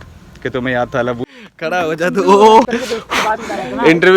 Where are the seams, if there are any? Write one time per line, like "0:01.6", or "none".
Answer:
0:01.2
0:02.7